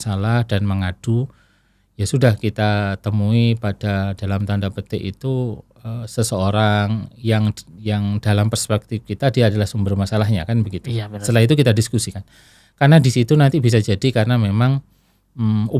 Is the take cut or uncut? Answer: uncut